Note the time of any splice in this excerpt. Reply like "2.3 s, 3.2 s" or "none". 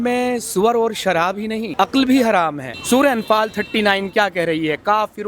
1.7 s, 2.7 s